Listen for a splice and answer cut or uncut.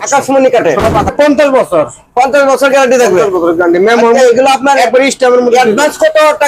cut